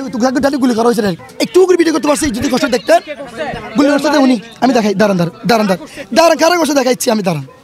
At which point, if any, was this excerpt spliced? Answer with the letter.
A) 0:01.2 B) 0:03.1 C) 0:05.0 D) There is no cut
A